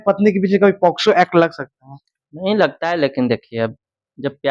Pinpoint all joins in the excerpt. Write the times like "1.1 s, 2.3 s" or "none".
none